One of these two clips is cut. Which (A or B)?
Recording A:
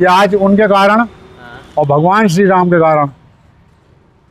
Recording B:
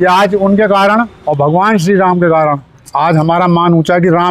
B